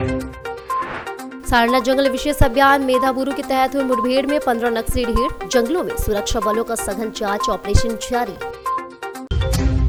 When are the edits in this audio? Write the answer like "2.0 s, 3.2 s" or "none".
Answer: none